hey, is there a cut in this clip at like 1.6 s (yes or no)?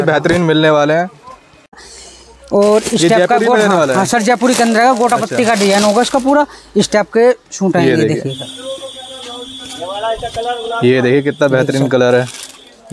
no